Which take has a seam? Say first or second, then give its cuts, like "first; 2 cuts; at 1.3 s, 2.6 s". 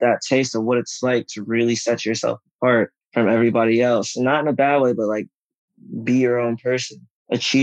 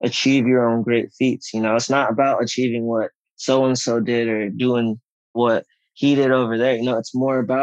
second; 1 cut; at 5.3 s